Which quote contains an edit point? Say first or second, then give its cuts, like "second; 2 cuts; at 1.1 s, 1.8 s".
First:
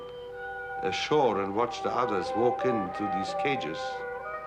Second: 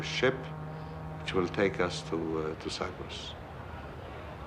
first; 1 cut; at 2.1 s